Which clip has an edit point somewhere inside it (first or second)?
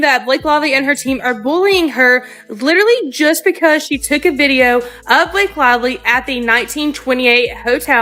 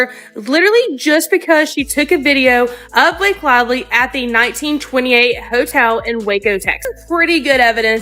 second